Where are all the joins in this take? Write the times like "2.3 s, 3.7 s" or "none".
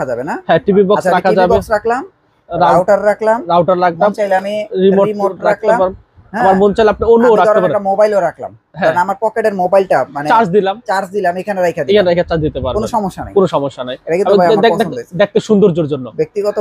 none